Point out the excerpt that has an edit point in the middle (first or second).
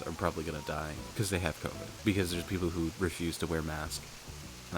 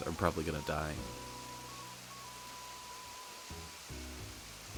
first